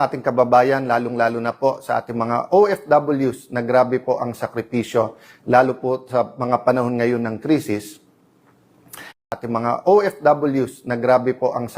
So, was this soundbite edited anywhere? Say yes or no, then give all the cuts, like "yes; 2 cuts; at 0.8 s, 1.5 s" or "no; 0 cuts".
yes; 1 cut; at 9.3 s